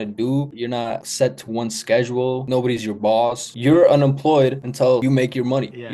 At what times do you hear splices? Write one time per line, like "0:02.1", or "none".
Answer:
0:01.0
0:03.5
0:04.9